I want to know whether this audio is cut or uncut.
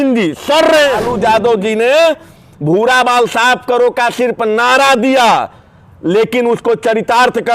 cut